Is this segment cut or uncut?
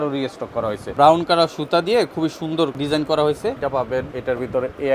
cut